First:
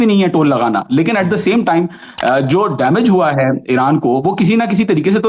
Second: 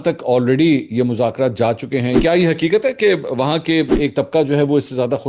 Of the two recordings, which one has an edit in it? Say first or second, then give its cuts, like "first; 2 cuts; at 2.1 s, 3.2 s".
second; 2 cuts; at 2.2 s, 4.0 s